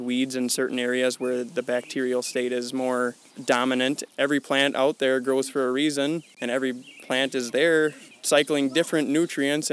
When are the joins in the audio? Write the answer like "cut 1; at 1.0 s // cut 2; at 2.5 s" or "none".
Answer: cut 1; at 3.6 s // cut 2; at 6.3 s // cut 3; at 8.1 s